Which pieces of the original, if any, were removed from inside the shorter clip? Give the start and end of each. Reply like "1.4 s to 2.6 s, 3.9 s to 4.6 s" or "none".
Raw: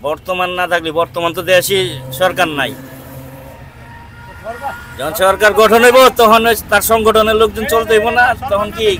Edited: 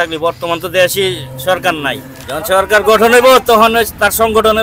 2.9 s to 4.9 s